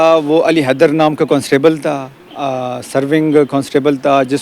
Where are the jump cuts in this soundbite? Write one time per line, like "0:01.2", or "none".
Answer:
none